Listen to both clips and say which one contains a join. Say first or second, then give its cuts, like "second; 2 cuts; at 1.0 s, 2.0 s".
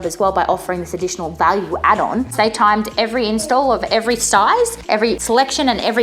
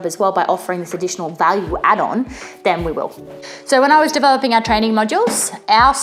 first; 2 cuts; at 2.3 s, 5.1 s